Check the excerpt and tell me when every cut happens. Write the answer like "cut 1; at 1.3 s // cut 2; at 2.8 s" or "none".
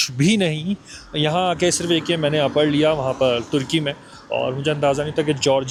none